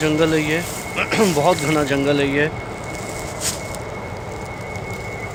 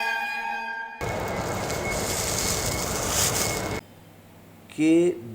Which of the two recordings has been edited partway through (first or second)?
second